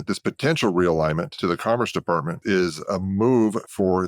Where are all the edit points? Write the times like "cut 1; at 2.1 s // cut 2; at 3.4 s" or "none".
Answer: cut 1; at 1.3 s // cut 2; at 2.3 s